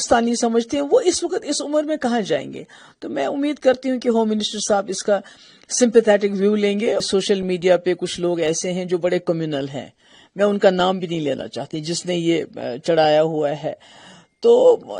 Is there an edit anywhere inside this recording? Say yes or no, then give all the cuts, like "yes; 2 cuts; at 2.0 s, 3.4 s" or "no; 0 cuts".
yes; 1 cut; at 7.1 s